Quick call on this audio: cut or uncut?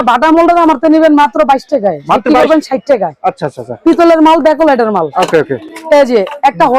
uncut